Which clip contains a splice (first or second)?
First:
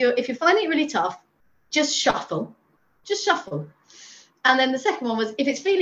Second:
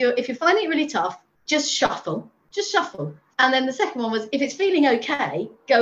second